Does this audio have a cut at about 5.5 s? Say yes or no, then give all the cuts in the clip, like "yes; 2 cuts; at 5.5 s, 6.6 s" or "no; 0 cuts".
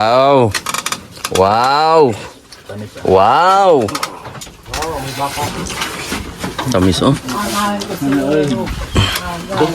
yes; 1 cut; at 5.5 s